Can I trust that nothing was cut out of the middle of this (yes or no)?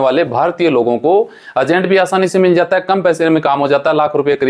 yes